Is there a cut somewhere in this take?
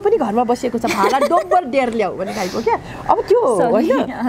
no; 0 cuts

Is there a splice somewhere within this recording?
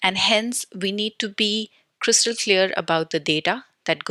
no; 0 cuts

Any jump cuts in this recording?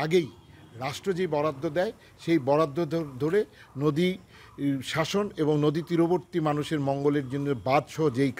no; 0 cuts

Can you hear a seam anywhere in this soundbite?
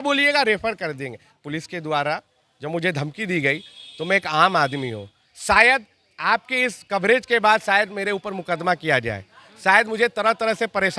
yes; 1 cut; at 1.4 s

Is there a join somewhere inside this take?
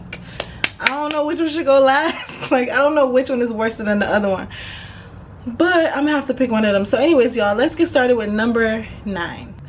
no; 0 cuts

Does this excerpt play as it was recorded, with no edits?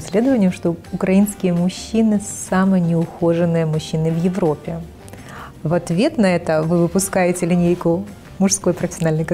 yes; 0 cuts

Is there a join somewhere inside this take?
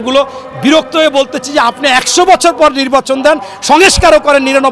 no; 0 cuts

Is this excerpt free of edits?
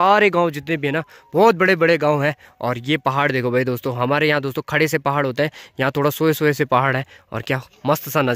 yes; 0 cuts

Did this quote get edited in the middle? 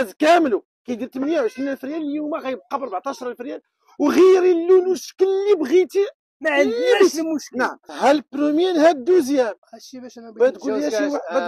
yes; 1 cut; at 7.8 s

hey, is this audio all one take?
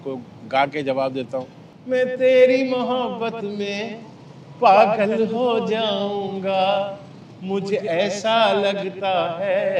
yes; 0 cuts

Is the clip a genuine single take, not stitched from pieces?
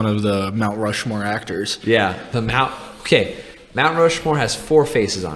yes; 0 cuts

